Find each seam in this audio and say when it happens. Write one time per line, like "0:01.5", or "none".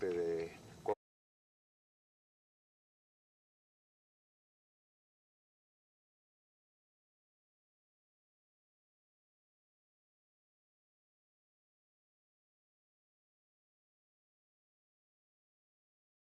none